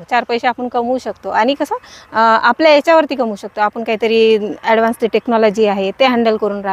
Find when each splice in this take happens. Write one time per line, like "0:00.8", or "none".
none